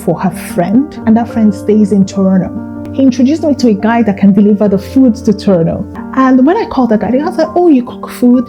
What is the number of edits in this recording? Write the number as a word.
three